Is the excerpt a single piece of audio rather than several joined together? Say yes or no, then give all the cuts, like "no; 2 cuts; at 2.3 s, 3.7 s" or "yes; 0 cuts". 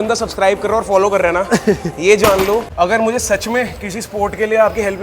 no; 1 cut; at 2.7 s